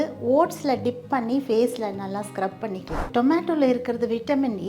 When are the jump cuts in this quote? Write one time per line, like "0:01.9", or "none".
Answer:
0:03.1